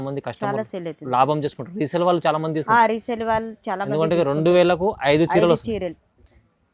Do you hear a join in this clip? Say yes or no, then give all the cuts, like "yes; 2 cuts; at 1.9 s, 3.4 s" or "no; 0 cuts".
no; 0 cuts